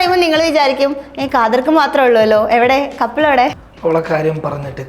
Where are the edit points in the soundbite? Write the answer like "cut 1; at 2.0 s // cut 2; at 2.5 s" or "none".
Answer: cut 1; at 3.7 s